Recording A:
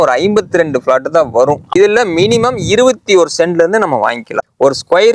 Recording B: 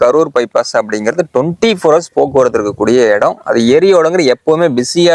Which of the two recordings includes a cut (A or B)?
A